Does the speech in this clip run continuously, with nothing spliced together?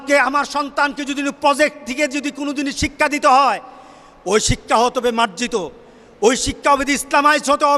yes; 0 cuts

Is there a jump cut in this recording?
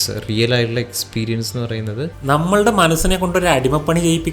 yes; 1 cut; at 2.2 s

